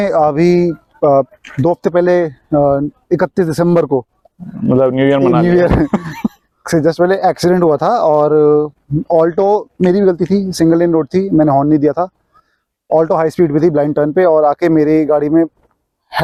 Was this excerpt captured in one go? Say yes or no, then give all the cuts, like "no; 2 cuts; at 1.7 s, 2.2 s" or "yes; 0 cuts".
yes; 0 cuts